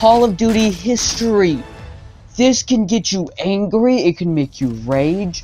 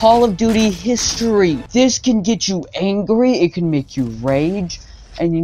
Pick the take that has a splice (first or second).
second